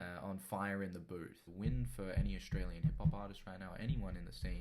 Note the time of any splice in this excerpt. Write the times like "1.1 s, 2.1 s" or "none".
1.4 s